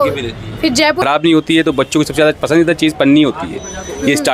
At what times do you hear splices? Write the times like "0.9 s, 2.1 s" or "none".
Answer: 1.0 s